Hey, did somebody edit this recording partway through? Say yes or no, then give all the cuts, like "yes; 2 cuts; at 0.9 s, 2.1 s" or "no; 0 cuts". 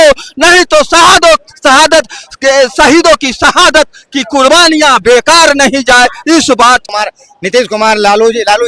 yes; 1 cut; at 6.9 s